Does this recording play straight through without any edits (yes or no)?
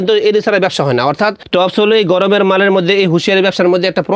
no